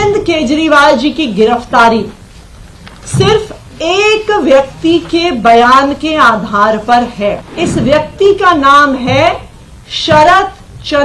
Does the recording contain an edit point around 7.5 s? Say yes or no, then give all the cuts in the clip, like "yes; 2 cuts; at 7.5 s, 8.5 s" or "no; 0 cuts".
yes; 1 cut; at 7.5 s